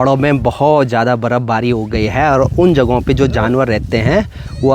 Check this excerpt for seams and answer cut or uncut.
uncut